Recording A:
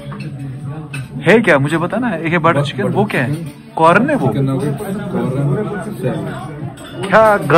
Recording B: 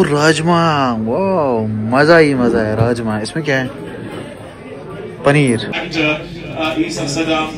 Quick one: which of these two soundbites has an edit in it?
B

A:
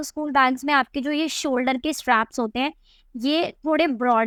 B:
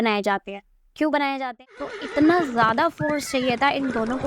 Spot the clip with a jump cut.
B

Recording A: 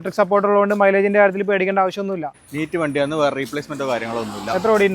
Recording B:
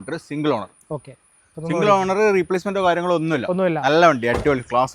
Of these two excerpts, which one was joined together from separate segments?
A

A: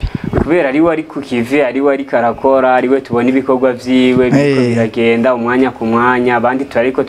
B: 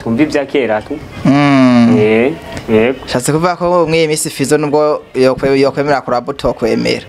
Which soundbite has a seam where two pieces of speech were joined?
B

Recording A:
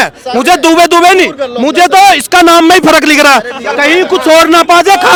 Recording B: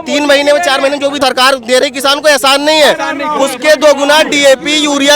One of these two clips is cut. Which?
B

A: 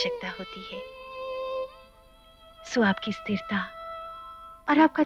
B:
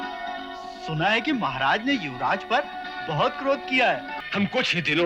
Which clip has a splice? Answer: B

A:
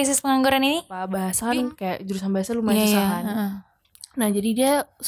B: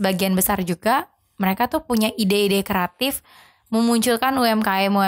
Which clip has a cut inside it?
A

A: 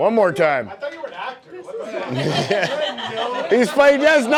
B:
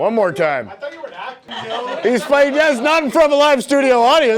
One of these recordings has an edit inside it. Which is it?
B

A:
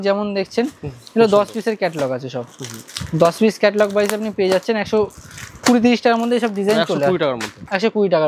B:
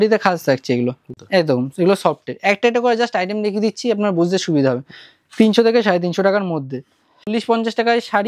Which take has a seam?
B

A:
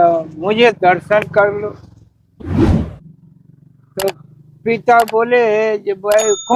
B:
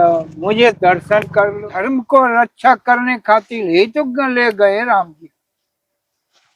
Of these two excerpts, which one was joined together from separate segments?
B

